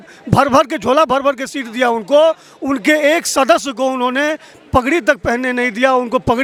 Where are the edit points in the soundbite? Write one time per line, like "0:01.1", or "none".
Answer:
none